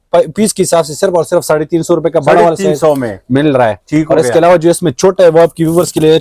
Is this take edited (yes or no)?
no